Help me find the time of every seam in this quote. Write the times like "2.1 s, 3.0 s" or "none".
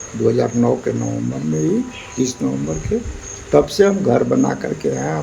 none